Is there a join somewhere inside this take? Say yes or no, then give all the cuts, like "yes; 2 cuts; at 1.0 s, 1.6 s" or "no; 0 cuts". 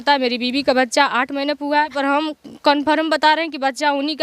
yes; 1 cut; at 1.9 s